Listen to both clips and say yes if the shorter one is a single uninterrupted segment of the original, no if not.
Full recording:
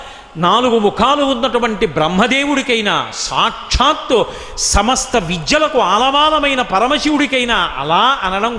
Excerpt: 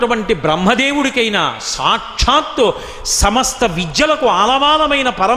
yes